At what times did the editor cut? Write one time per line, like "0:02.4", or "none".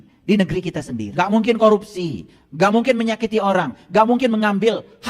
0:01.1

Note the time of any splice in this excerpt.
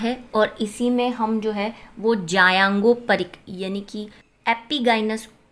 none

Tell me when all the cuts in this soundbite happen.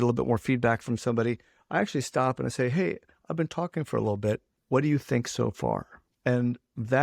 none

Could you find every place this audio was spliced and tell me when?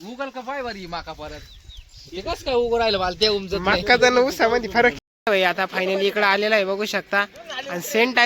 0:05.0

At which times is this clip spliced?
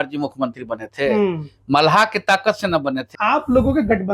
0:03.0

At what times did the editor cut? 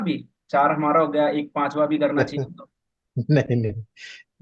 none

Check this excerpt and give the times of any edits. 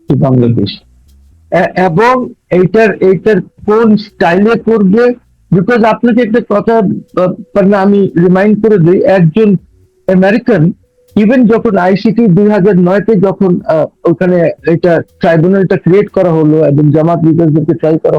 none

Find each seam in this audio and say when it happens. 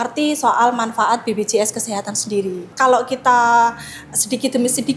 0:02.7

